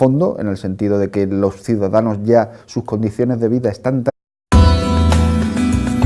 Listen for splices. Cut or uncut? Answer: uncut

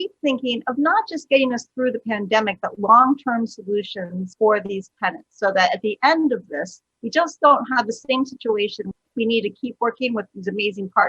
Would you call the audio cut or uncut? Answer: cut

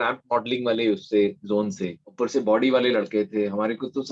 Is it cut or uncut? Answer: uncut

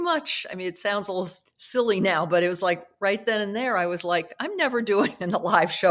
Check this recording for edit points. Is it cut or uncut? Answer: uncut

